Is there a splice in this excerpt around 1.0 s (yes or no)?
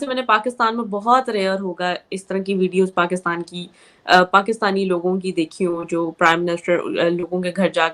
no